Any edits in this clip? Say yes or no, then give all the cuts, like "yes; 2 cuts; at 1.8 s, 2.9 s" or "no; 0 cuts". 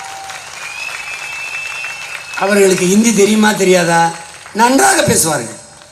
no; 0 cuts